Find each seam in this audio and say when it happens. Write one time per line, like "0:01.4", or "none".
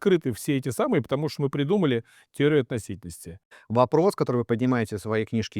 0:03.6